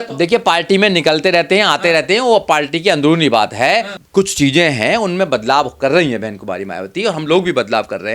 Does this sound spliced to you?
yes; 1 cut; at 4.0 s

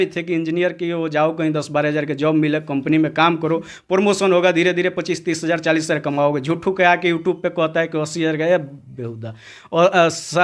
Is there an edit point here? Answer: no; 0 cuts

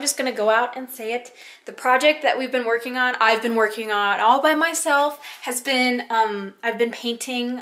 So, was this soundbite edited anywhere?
no; 0 cuts

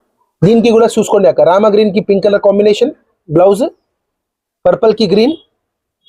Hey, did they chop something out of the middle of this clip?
no; 0 cuts

